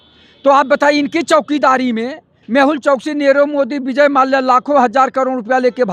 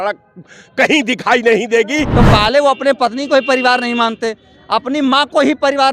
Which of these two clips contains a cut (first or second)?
second